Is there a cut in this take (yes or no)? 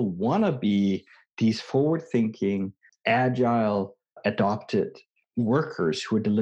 yes